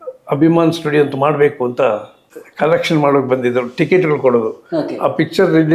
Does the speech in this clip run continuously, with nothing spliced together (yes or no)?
yes